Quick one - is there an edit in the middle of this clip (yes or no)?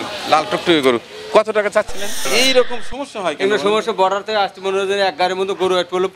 yes